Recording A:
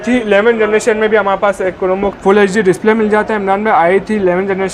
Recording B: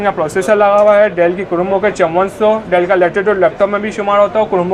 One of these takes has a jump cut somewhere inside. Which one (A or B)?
A